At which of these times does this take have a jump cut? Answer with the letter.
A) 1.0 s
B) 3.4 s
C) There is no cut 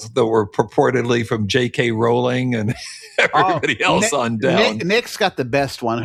C